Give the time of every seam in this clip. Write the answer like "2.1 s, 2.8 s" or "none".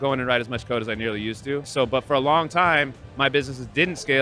1.7 s